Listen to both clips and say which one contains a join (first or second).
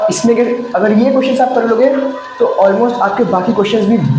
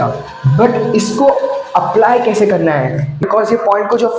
second